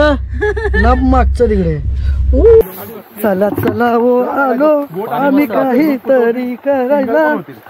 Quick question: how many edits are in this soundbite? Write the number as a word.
one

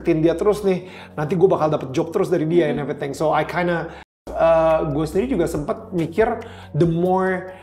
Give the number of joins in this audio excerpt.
one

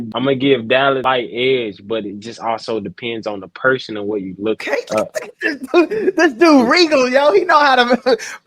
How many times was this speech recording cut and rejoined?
two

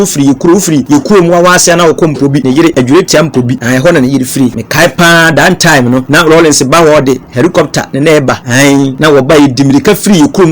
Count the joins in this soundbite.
six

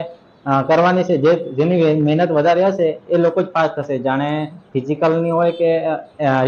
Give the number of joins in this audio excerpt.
zero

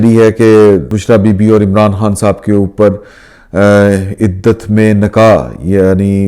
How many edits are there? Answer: one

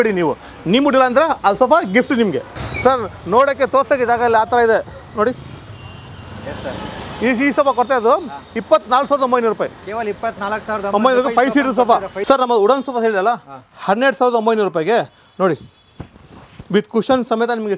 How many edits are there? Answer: two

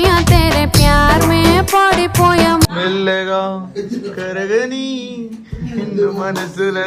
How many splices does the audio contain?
one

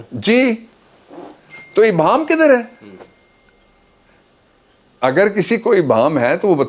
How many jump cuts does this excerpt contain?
zero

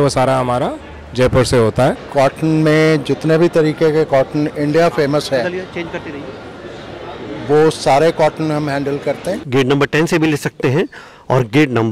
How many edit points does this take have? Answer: two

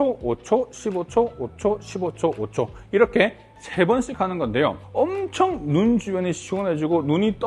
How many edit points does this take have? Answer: one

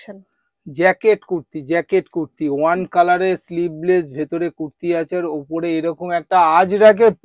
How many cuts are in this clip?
zero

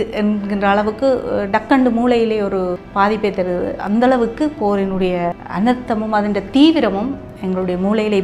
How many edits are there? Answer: two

